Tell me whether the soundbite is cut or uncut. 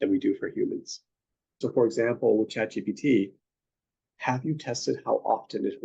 cut